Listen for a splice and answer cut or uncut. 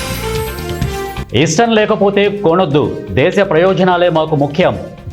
uncut